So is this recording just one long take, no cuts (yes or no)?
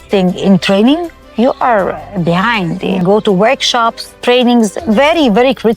no